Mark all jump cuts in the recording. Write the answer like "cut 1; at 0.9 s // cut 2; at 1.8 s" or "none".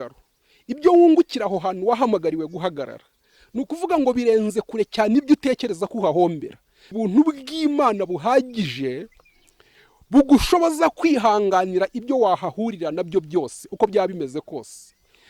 cut 1; at 6.9 s